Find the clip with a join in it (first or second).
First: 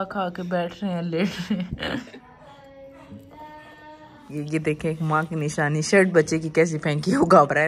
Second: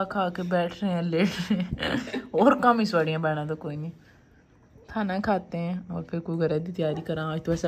first